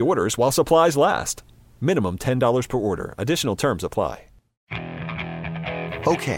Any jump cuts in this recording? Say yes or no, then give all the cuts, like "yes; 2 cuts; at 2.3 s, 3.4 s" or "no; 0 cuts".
yes; 1 cut; at 4.5 s